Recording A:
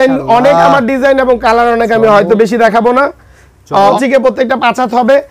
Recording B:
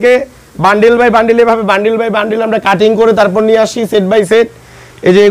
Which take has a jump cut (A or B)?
A